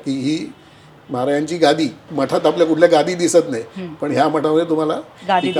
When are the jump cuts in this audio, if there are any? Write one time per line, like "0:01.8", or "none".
0:02.1